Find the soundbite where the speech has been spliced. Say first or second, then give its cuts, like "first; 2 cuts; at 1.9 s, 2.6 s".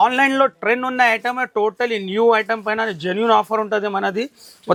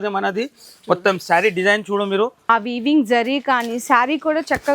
second; 1 cut; at 2.4 s